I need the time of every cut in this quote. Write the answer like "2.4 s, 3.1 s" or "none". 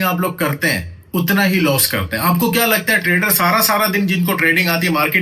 none